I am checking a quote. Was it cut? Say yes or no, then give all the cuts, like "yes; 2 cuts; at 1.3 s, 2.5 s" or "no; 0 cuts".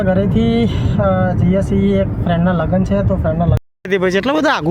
yes; 1 cut; at 3.6 s